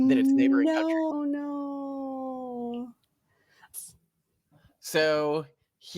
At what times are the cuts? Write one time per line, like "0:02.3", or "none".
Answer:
0:03.6